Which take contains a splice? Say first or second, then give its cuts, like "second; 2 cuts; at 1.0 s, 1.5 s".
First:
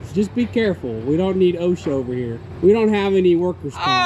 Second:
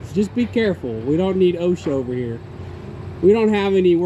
first; 1 cut; at 2.4 s